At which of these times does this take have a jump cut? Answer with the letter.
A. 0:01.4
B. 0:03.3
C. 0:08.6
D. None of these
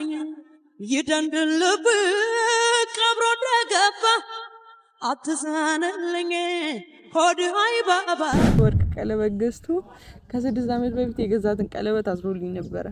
C